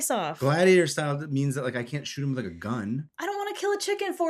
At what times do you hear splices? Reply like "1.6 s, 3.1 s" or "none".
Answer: 3.1 s